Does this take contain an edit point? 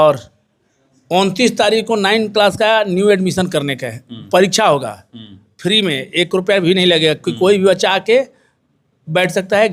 no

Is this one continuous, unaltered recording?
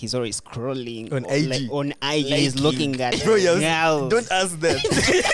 yes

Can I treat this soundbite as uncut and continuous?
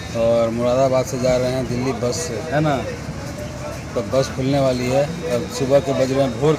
yes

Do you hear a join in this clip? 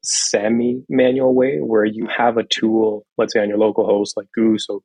no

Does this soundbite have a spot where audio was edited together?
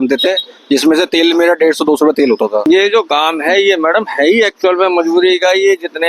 yes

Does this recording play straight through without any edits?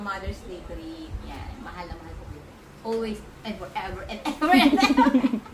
yes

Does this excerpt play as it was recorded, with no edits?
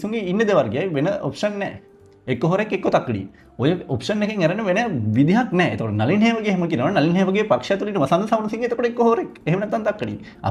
yes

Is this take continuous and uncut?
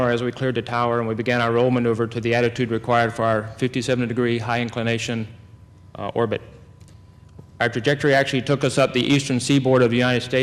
no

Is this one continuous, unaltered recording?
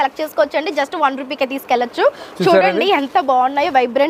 yes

